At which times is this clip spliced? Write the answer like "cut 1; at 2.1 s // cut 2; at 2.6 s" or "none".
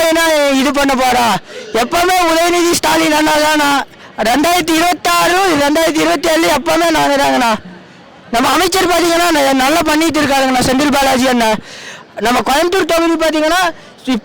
none